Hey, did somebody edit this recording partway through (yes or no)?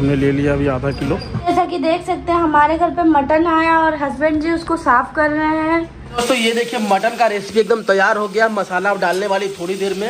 yes